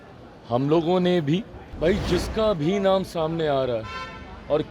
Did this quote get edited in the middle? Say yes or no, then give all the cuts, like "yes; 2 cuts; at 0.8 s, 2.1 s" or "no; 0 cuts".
yes; 1 cut; at 1.6 s